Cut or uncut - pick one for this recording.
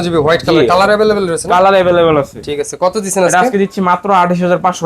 uncut